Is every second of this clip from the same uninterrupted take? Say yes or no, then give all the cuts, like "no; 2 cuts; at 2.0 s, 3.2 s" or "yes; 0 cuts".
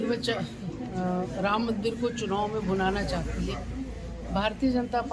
yes; 0 cuts